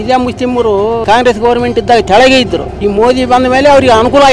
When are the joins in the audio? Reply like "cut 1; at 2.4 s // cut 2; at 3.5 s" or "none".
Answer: cut 1; at 1.0 s // cut 2; at 2.7 s